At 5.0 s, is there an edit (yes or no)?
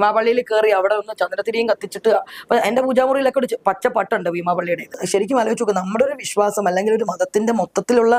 yes